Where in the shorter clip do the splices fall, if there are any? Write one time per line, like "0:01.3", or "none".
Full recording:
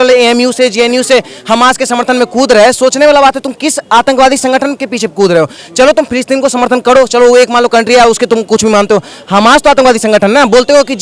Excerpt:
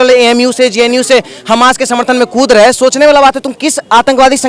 none